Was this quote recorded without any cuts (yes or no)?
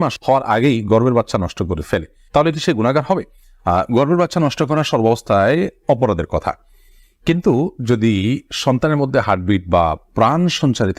yes